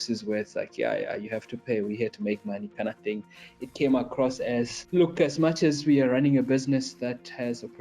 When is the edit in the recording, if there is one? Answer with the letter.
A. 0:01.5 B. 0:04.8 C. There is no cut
B